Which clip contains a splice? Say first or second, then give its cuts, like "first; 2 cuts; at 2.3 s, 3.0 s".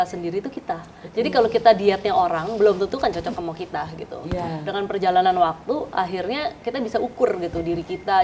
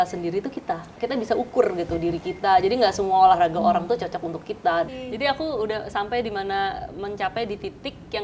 second; 2 cuts; at 0.9 s, 4.9 s